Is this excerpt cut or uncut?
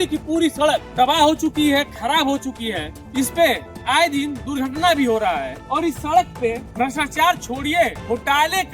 uncut